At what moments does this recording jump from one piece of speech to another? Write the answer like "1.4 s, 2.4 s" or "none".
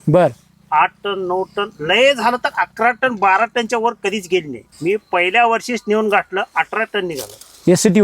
4.6 s